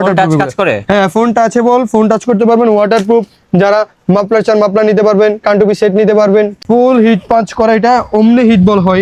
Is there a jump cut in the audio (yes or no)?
yes